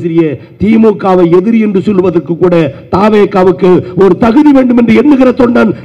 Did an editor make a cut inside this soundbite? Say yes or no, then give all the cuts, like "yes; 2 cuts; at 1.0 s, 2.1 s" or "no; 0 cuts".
no; 0 cuts